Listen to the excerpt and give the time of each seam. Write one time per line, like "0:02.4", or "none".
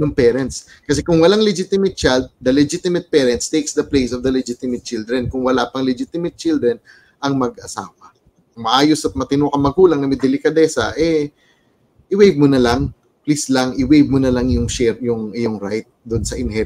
0:08.5